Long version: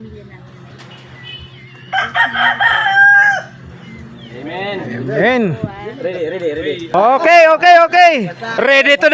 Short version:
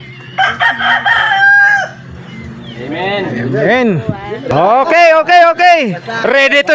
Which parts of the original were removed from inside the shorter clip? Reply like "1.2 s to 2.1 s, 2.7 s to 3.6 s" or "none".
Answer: 6.0 s to 6.8 s